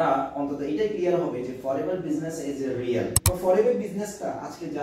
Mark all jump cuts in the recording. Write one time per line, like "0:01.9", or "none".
0:03.2